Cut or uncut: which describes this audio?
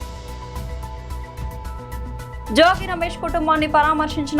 cut